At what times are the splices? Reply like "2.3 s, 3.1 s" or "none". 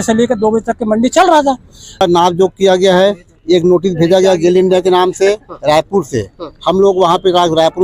2.0 s